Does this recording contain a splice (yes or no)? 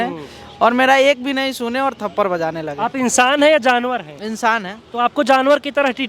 no